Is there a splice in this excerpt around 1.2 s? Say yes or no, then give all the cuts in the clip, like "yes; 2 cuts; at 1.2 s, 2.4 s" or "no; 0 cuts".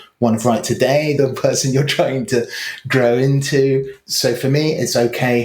yes; 2 cuts; at 1.2 s, 4.0 s